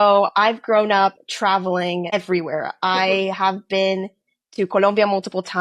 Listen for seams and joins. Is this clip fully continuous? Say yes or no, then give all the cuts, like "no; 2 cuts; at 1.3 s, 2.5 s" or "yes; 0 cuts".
yes; 0 cuts